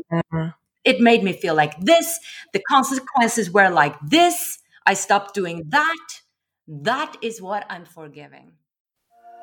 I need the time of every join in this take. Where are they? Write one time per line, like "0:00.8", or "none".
0:08.5